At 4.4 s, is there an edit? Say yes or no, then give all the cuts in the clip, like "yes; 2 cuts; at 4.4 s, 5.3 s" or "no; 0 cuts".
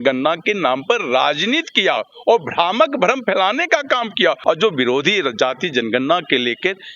yes; 1 cut; at 4.4 s